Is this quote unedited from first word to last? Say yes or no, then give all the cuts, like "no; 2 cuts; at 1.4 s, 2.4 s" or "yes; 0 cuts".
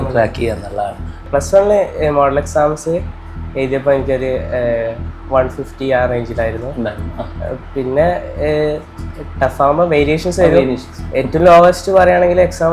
no; 1 cut; at 1.2 s